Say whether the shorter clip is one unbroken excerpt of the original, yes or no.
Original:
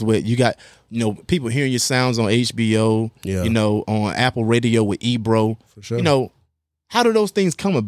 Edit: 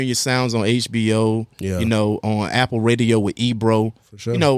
yes